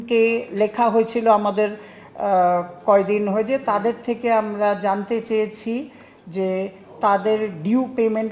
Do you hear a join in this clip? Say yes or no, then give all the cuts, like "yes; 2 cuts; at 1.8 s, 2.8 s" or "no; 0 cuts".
no; 0 cuts